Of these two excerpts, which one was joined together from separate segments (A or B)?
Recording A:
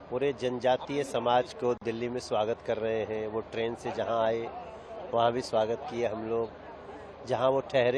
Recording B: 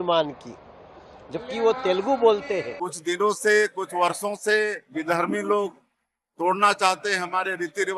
B